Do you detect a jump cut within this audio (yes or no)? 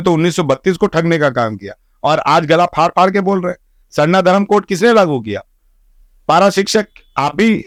no